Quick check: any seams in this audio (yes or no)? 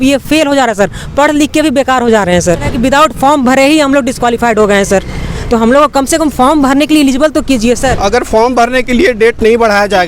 yes